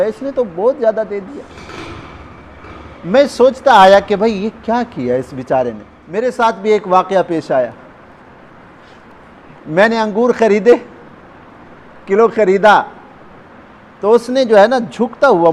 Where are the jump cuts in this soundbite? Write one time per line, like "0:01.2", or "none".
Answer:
0:05.9